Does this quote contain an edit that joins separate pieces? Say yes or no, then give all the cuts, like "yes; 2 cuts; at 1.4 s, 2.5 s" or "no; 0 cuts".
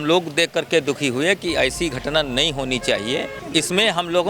yes; 1 cut; at 3.4 s